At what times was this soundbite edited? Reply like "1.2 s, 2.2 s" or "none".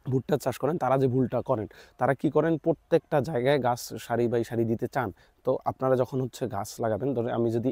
none